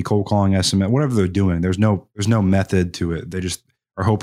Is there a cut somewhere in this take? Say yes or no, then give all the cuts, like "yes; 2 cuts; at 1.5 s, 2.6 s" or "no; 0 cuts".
yes; 1 cut; at 2.1 s